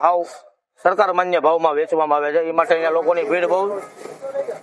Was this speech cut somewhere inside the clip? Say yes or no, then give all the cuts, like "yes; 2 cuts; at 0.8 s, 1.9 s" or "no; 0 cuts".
no; 0 cuts